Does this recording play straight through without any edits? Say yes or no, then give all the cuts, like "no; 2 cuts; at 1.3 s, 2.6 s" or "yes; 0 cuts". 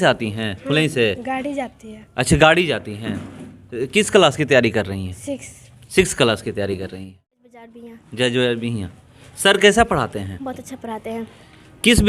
no; 1 cut; at 7.7 s